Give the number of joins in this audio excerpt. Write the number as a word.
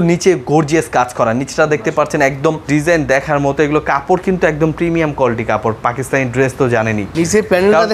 two